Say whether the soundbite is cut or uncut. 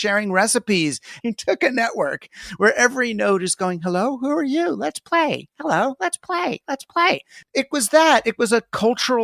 cut